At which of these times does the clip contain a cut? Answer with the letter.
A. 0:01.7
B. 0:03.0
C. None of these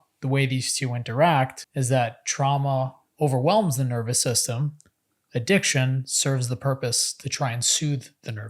A